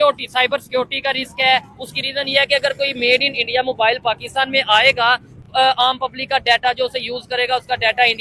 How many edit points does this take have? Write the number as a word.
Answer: one